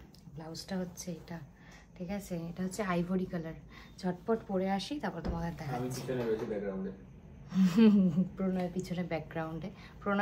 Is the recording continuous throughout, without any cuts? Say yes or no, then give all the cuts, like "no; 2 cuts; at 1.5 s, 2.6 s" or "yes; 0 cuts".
yes; 0 cuts